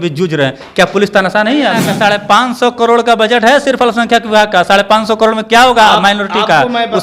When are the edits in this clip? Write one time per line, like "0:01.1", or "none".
0:01.9